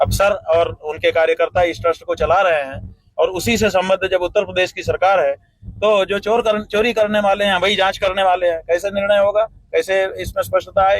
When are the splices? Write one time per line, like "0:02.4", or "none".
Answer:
0:09.4